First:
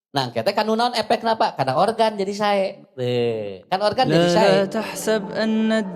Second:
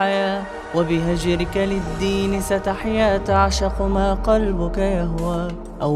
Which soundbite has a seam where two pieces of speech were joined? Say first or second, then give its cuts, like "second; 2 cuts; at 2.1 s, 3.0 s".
first; 1 cut; at 4.3 s